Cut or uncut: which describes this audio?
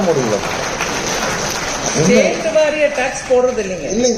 cut